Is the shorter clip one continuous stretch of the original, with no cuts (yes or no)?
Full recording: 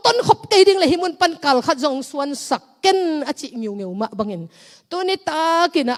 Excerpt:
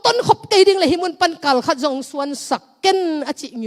yes